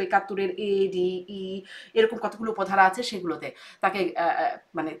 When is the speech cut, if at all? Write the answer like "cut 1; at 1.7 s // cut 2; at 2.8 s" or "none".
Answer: none